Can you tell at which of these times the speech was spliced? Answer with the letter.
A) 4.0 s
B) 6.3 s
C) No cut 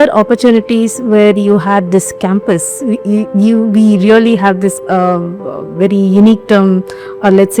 C